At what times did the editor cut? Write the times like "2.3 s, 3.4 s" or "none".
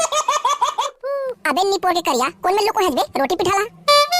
0.9 s